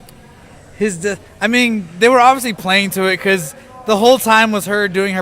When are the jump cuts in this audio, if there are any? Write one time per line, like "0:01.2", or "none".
0:03.9